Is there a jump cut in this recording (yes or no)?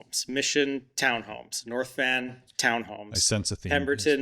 no